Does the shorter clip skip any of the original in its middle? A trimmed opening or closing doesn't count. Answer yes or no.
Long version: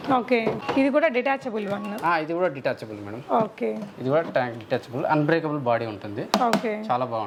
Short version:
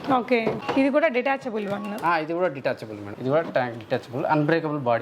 yes